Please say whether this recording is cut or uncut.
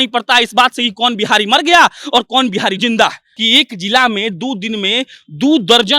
cut